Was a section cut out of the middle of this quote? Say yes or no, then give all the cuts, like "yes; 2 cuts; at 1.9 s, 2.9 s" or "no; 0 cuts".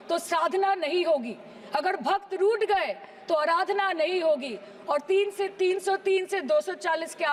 no; 0 cuts